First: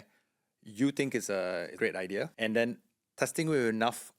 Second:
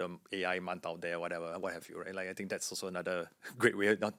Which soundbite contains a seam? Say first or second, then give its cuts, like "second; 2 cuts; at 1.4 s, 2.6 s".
first; 1 cut; at 1.8 s